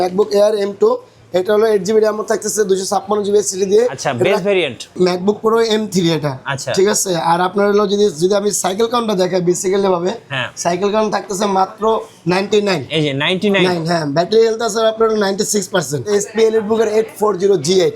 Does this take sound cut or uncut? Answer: cut